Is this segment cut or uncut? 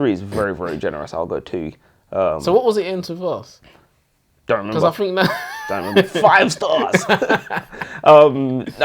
uncut